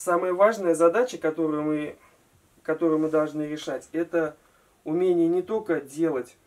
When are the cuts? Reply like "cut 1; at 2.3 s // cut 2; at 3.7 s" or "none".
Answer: none